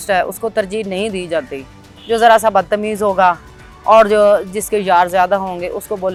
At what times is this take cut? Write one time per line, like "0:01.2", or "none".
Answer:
none